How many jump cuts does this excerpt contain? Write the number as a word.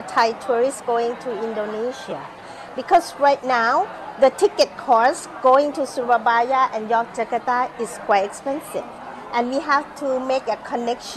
zero